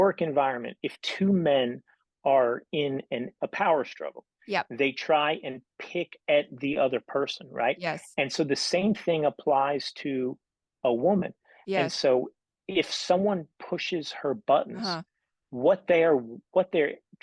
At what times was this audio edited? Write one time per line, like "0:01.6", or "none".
0:03.4